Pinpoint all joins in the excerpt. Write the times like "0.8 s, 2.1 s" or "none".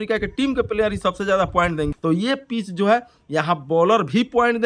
1.9 s